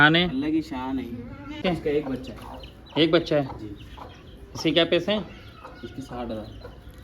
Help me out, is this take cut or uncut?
cut